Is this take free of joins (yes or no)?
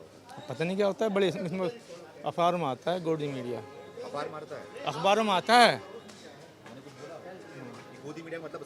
yes